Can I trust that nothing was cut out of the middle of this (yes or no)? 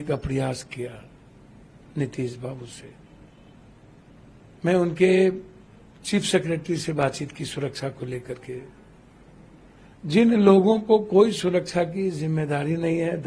yes